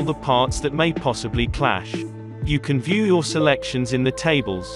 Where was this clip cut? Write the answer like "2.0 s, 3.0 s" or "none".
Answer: none